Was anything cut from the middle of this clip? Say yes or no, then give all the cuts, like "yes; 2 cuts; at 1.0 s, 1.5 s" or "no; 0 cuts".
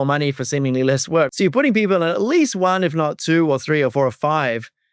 yes; 1 cut; at 1.3 s